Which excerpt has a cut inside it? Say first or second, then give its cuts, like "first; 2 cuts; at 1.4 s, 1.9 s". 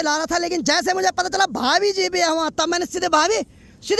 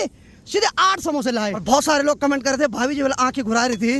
second; 1 cut; at 1.6 s